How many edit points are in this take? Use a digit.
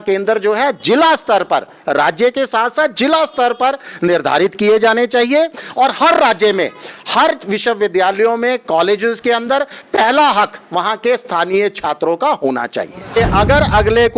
1